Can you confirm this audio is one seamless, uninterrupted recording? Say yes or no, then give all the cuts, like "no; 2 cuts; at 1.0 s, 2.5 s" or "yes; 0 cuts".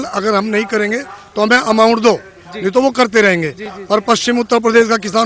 yes; 0 cuts